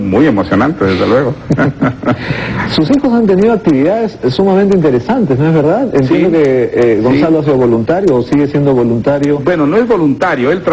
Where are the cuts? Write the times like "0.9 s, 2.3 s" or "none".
3.9 s